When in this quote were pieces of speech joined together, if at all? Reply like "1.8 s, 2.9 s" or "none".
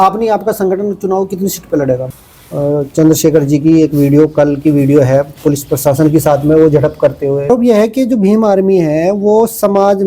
2.1 s, 7.5 s